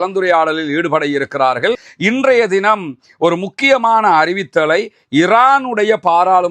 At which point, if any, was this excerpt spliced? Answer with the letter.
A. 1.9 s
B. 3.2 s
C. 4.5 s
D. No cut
A